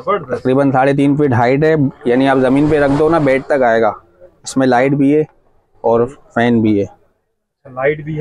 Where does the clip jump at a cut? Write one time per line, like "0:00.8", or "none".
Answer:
none